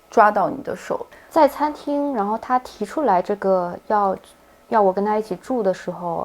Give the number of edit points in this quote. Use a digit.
1